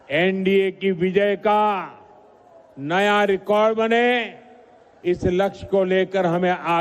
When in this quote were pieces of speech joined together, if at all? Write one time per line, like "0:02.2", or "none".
0:01.8